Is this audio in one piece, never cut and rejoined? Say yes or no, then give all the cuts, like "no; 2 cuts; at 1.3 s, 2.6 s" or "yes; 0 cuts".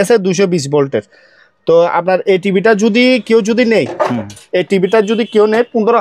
yes; 0 cuts